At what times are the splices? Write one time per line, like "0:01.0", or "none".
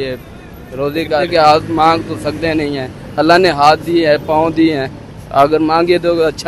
0:01.3